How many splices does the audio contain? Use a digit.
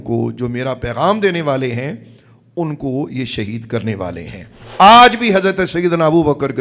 1